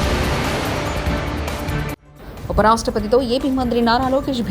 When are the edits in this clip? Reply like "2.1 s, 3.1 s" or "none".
none